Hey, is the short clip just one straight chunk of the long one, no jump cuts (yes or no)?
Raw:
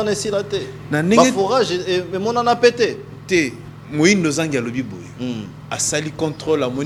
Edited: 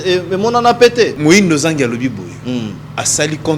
no